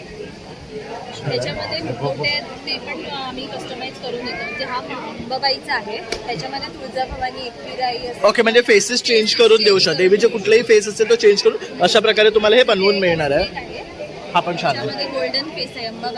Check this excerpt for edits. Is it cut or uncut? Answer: uncut